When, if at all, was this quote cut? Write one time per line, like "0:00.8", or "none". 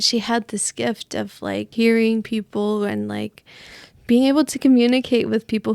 none